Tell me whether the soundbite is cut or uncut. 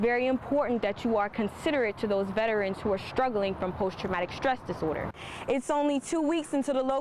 cut